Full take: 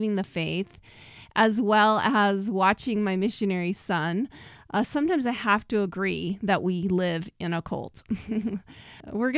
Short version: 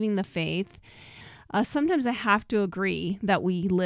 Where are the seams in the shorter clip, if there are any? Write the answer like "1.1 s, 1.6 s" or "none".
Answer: 1.2 s